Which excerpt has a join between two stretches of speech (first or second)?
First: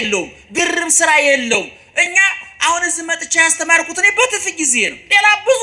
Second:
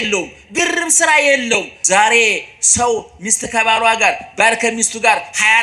second